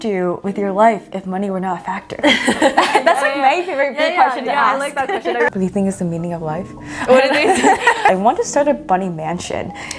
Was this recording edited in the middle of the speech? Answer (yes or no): yes